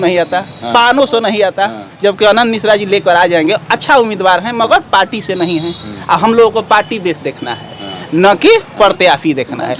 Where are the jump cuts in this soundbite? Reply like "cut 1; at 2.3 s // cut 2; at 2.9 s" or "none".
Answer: none